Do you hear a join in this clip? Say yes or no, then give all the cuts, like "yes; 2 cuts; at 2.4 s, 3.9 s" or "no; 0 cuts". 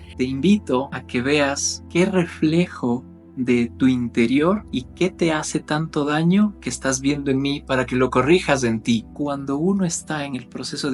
yes; 4 cuts; at 1.0 s, 1.7 s, 4.7 s, 9.1 s